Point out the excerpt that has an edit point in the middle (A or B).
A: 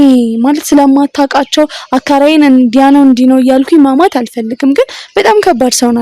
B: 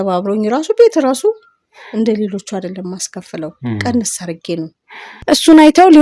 B